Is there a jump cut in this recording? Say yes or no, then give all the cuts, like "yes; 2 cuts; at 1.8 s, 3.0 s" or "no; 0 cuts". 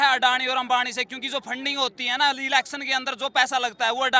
no; 0 cuts